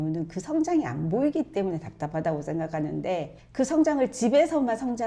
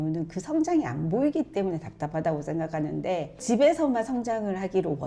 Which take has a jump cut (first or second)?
second